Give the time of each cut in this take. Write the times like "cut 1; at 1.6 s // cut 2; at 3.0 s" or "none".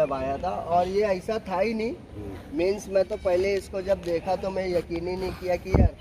none